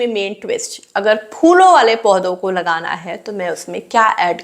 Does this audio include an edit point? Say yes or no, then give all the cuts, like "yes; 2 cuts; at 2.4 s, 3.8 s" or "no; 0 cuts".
no; 0 cuts